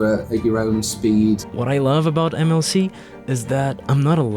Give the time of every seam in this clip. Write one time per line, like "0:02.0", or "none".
0:01.5